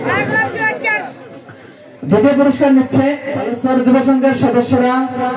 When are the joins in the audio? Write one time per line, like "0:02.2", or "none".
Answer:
0:03.5